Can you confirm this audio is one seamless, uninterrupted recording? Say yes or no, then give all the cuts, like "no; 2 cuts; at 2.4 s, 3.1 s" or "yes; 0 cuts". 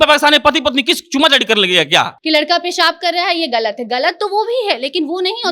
no; 1 cut; at 2.2 s